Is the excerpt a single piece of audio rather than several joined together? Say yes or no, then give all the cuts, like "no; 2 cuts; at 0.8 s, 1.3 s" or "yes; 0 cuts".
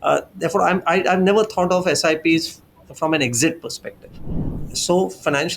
no; 1 cut; at 4.5 s